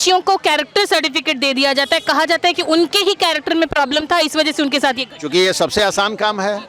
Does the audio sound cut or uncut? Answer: uncut